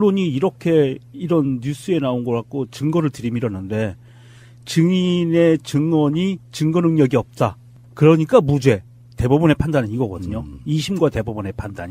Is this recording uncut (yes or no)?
no